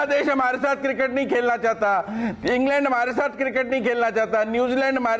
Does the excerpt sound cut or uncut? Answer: uncut